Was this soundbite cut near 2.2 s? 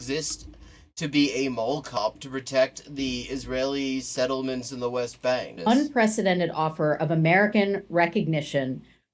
no; 1 cut; at 5.5 s

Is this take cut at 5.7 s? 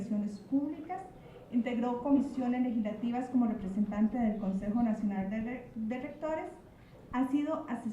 no; 1 cut; at 1.1 s

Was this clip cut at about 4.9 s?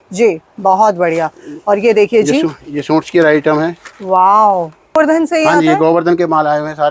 yes; 1 cut; at 4.9 s

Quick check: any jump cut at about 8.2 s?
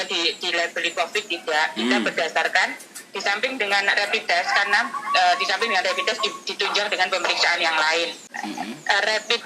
yes; 1 cut; at 8.2 s

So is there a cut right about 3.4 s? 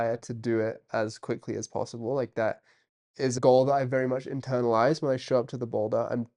yes; 1 cut; at 3.4 s

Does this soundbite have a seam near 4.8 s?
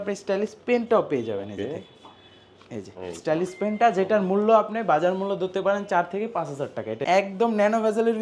no; 1 cut; at 7.0 s

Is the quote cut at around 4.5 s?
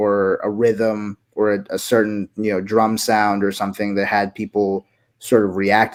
no; 0 cuts

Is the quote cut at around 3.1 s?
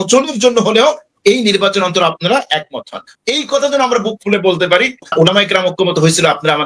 yes; 2 cuts; at 3.1 s, 5.1 s

